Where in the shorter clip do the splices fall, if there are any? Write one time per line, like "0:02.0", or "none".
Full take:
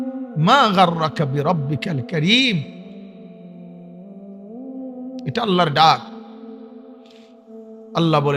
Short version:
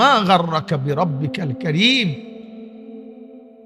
0:02.5